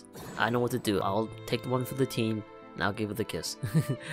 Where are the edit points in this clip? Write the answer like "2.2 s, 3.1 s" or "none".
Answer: 1.0 s